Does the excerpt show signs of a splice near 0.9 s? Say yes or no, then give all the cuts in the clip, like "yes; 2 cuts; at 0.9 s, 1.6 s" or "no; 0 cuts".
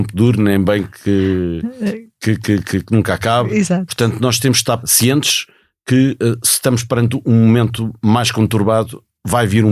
no; 1 cut; at 4.8 s